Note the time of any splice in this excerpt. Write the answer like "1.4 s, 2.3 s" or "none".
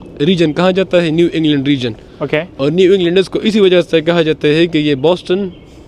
none